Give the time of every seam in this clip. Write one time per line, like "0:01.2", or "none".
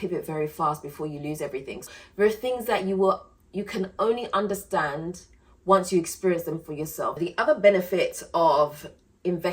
0:01.9
0:07.2